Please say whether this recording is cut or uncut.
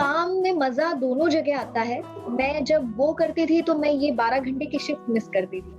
uncut